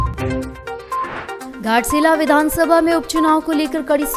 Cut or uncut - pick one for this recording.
cut